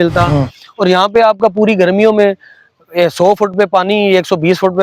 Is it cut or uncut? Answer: uncut